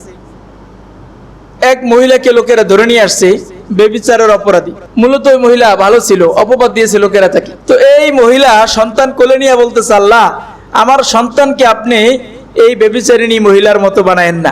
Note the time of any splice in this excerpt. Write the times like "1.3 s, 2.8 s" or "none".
4.8 s, 7.5 s